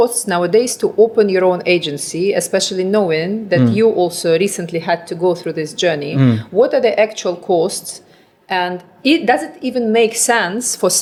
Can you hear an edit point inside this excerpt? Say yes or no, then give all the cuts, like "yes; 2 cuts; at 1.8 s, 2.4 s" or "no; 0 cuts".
no; 0 cuts